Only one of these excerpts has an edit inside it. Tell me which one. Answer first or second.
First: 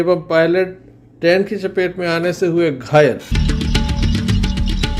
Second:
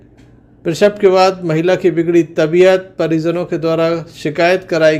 first